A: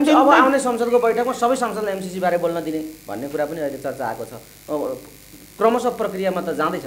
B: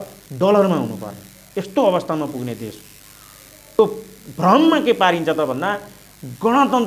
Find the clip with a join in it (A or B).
B